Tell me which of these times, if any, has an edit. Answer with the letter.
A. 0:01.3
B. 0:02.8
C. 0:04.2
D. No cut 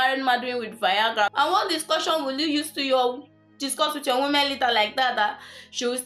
A